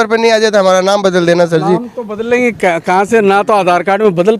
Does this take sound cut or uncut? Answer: uncut